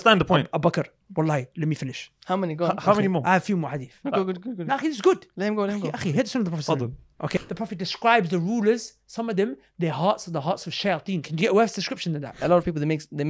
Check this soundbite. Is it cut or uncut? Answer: cut